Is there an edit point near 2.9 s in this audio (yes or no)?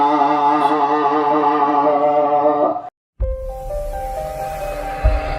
yes